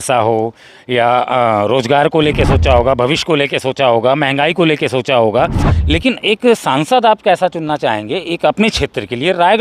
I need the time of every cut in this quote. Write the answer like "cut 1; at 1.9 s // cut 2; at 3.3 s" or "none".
cut 1; at 5.7 s